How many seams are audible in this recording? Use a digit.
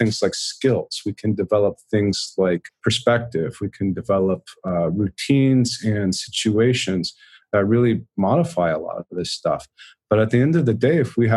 1